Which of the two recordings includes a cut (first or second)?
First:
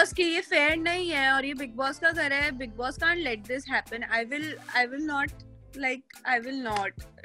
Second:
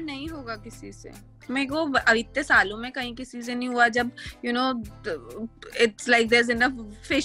second